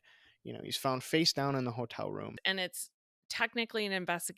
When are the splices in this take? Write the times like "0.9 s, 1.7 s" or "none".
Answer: 2.4 s